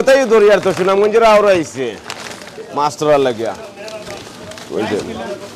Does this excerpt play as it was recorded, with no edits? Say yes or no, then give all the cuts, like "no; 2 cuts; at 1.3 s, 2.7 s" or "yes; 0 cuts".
yes; 0 cuts